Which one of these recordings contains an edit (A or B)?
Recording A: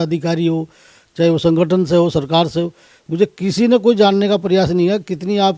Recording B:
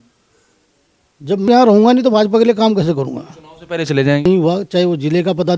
B